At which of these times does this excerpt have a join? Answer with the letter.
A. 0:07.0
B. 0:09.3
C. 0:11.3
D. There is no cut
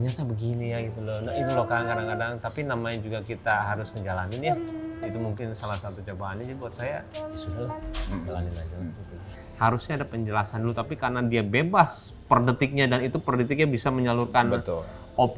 B